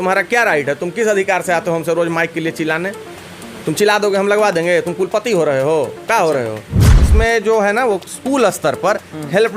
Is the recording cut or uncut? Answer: cut